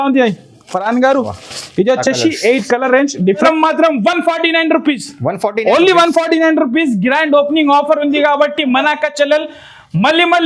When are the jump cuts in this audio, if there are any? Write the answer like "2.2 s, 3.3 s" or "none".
3.5 s